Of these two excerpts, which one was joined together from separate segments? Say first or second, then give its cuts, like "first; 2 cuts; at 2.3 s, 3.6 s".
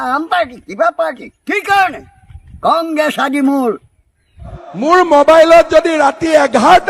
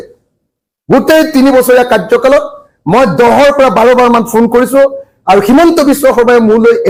first; 1 cut; at 4.7 s